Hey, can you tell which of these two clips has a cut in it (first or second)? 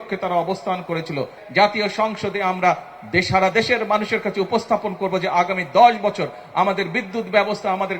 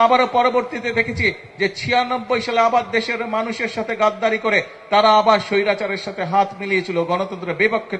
first